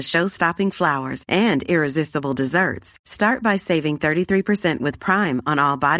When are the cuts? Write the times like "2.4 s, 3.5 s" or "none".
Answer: none